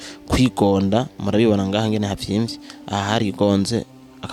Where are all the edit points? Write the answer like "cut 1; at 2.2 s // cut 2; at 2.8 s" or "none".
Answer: none